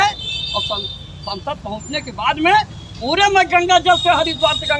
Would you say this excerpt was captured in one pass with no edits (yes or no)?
yes